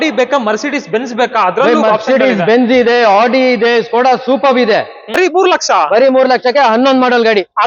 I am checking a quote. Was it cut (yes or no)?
yes